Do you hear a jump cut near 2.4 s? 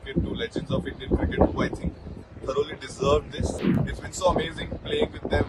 no; 1 cut; at 3.7 s

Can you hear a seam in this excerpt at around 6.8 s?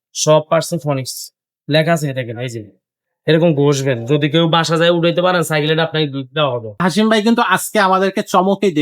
yes; 1 cut; at 6.8 s

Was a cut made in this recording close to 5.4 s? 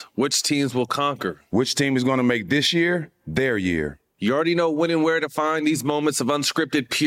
no; 1 cut; at 1.3 s

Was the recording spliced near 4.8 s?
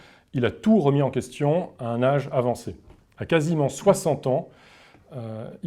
no; 0 cuts

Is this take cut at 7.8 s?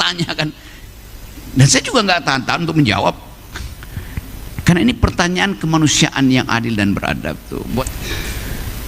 yes; 1 cut; at 7.8 s

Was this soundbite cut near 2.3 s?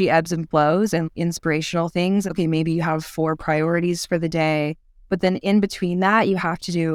yes; 2 cuts; at 1.1 s, 2.3 s

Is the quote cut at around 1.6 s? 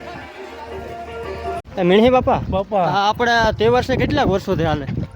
yes; 1 cut; at 1.6 s

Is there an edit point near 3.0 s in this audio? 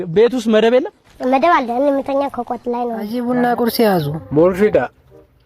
yes; 1 cut; at 3.0 s

